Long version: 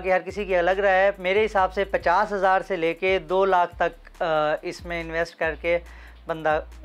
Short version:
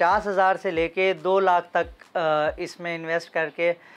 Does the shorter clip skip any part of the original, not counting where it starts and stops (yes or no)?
no